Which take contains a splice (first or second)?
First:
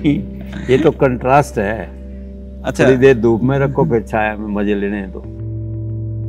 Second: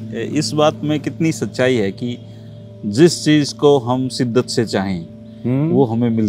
first